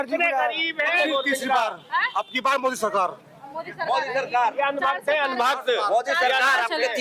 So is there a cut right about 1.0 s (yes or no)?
yes